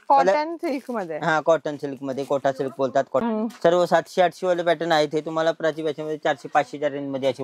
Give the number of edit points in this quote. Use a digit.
1